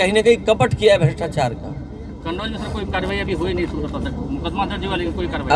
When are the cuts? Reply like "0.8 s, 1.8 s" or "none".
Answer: none